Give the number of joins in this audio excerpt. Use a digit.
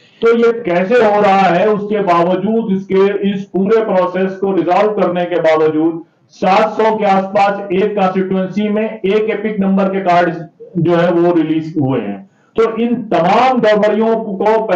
0